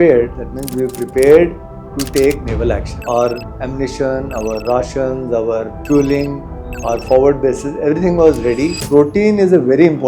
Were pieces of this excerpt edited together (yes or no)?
yes